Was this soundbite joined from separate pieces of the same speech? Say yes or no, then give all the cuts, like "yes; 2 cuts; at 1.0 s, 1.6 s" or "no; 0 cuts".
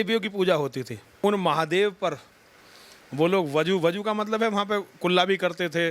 yes; 1 cut; at 1.0 s